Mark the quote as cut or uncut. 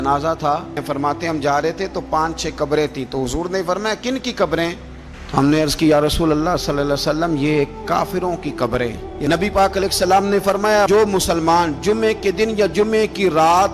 cut